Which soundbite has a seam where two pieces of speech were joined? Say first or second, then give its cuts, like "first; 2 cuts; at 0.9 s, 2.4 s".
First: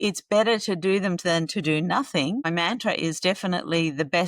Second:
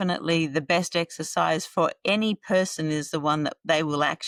first; 1 cut; at 2.5 s